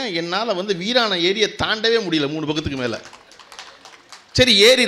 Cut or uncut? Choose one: uncut